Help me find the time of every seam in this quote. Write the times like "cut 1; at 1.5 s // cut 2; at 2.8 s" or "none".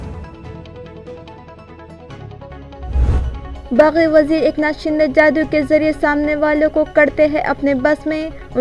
cut 1; at 3.4 s